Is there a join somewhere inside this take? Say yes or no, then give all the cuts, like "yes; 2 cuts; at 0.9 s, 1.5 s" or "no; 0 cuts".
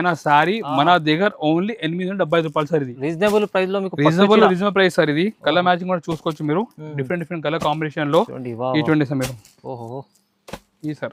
no; 0 cuts